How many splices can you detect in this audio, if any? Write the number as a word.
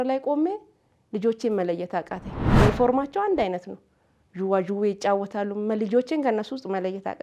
zero